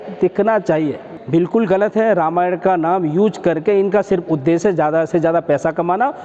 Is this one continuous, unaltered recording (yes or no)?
no